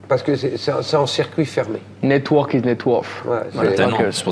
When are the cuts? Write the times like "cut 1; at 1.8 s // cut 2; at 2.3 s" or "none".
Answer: none